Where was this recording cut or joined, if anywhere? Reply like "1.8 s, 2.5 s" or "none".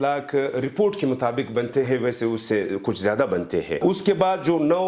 3.8 s